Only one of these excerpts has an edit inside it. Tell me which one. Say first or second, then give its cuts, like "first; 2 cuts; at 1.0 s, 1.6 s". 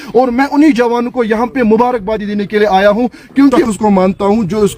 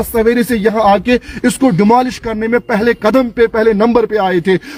first; 1 cut; at 3.7 s